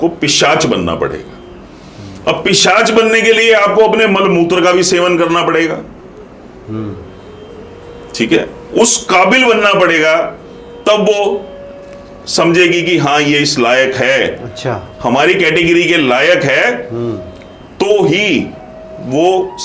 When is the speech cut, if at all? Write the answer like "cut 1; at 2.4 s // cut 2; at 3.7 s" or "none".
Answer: none